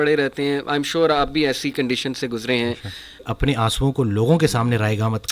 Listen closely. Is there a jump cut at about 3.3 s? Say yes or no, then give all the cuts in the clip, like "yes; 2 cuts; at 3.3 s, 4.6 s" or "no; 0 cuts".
yes; 1 cut; at 3.3 s